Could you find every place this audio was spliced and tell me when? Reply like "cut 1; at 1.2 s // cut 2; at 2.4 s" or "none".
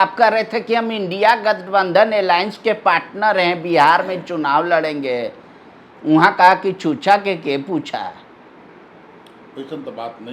none